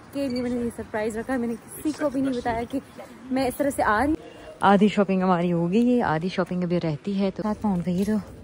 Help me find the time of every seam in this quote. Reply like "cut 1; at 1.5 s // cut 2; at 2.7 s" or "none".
cut 1; at 4.2 s // cut 2; at 7.4 s